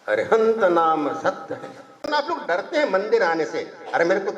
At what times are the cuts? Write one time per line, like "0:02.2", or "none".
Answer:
0:02.0